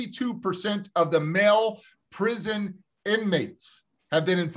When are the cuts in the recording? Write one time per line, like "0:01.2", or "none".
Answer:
none